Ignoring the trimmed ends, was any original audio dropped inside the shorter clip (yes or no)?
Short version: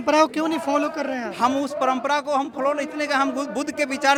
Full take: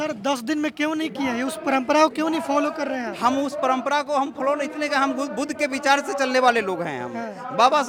no